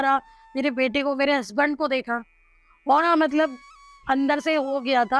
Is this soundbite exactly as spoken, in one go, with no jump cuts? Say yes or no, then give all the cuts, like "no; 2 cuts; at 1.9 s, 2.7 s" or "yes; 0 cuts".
no; 1 cut; at 3.0 s